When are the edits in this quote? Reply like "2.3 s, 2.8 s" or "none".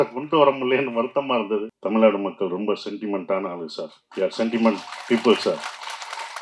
1.7 s